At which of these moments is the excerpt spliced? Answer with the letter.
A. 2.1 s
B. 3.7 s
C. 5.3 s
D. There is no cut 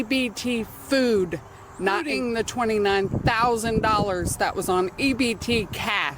A